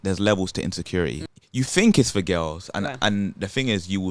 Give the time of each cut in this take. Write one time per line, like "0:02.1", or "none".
0:01.3